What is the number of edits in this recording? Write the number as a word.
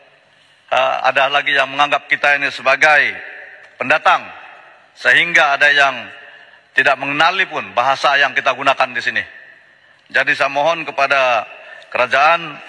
zero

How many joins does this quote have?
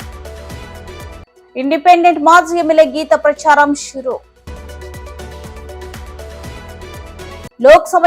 one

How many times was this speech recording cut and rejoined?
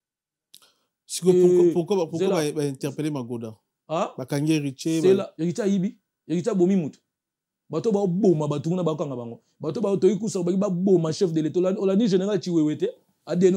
one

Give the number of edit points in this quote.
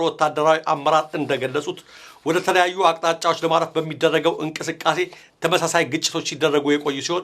one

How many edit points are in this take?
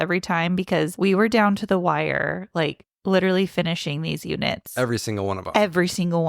one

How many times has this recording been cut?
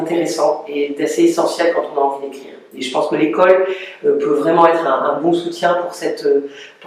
zero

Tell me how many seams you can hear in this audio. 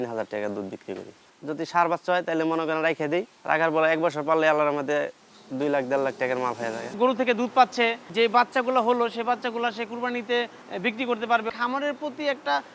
six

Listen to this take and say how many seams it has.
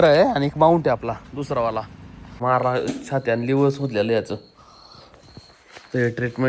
one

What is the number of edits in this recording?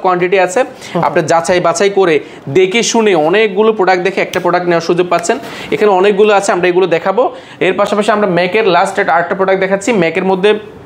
zero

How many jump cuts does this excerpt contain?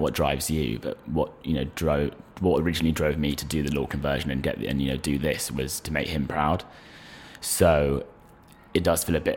zero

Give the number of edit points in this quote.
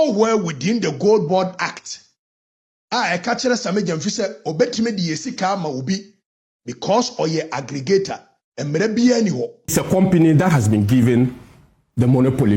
one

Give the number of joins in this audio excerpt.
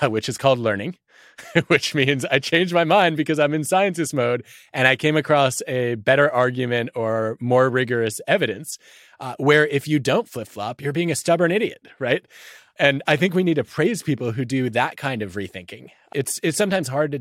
three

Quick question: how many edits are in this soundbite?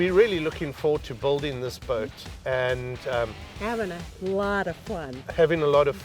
one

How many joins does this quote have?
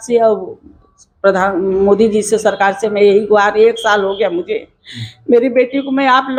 zero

